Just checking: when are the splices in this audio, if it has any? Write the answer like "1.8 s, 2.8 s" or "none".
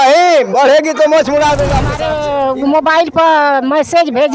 1.9 s

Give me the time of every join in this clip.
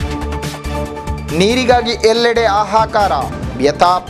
0.9 s

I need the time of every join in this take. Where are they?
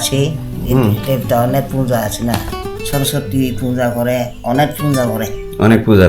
2.7 s

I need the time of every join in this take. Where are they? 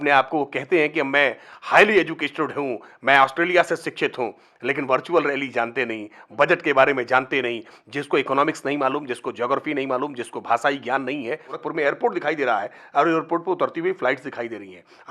11.6 s

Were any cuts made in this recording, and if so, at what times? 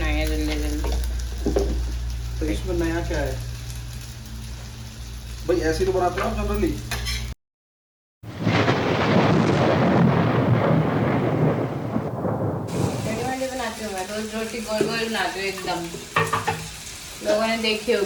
none

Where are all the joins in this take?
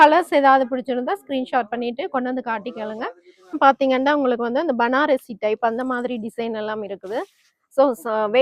3.5 s

